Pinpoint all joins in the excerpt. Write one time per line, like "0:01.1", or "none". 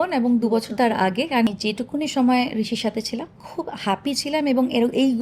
0:01.5